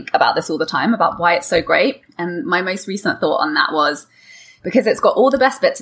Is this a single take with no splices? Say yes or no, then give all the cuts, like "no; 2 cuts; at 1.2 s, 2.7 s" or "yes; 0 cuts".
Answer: yes; 0 cuts